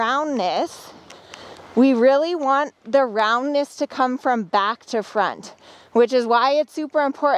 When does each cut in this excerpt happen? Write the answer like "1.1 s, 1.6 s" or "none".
none